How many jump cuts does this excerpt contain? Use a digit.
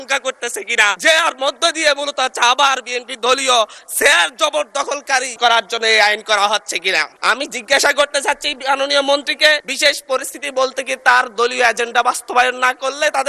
4